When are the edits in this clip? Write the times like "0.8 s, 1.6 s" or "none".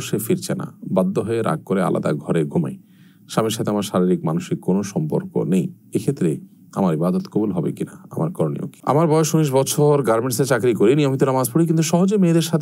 8.7 s